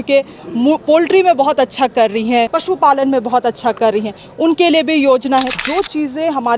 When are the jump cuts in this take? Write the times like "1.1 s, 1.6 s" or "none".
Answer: 2.6 s, 5.5 s